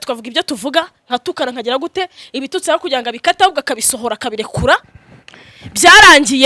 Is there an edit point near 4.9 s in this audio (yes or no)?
yes